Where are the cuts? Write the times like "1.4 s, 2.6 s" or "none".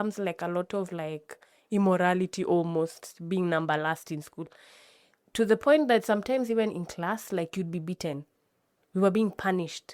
none